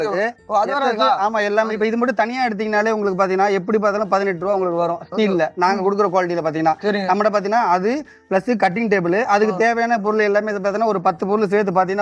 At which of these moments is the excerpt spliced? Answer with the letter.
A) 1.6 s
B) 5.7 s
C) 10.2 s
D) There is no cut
D